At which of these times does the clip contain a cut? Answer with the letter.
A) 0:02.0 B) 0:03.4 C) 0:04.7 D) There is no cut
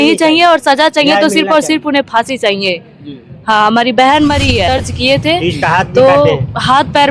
C